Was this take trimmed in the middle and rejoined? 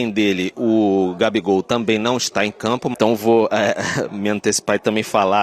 yes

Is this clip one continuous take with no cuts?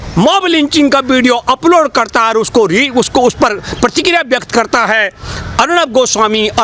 yes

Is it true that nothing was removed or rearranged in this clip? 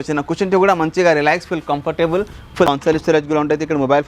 no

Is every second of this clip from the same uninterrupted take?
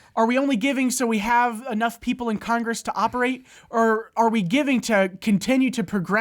yes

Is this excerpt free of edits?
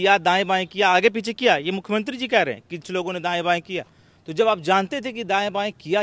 yes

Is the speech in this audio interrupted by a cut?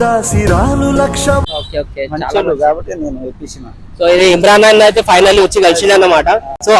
no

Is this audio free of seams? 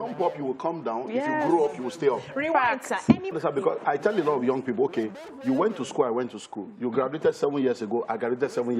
no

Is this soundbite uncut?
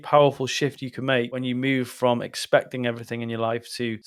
yes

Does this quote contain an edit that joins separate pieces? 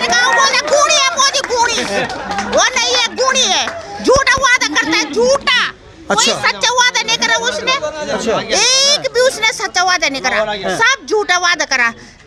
no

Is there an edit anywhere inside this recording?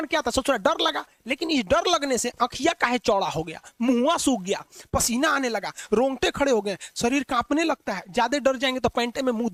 no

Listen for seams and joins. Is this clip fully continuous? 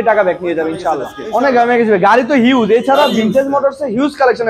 no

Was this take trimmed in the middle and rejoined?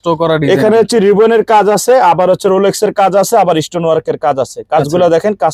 no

